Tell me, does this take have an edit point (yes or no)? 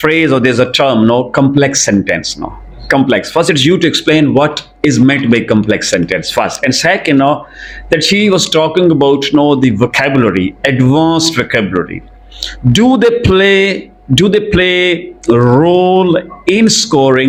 no